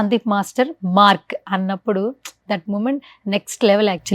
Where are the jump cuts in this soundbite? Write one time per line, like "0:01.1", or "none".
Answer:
0:01.3